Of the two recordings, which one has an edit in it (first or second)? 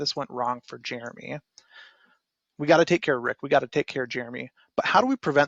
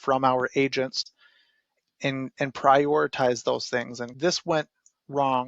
second